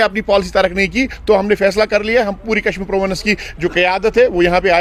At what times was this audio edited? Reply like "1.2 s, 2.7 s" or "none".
none